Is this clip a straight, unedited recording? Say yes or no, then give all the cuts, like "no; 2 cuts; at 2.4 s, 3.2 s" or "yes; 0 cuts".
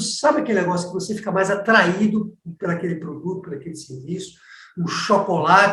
yes; 0 cuts